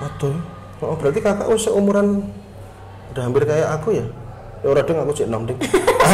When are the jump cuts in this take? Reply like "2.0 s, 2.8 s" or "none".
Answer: none